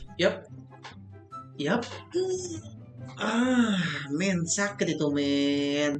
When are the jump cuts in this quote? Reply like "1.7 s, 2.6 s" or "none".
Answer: none